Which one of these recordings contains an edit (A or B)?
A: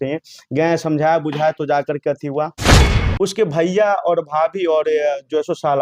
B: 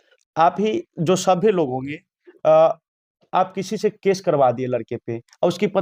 A